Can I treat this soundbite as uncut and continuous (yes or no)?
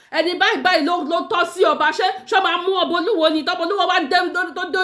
yes